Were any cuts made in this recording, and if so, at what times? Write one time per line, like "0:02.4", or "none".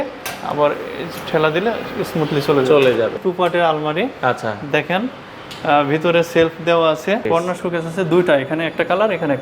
0:03.2
0:07.2